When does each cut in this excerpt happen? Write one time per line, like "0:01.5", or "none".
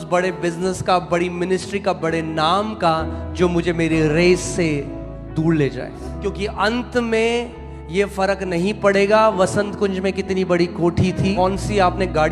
0:06.0
0:11.4